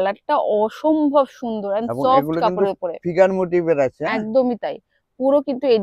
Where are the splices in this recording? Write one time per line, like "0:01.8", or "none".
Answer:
none